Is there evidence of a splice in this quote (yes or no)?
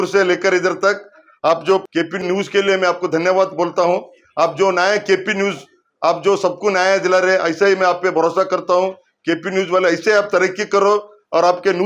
no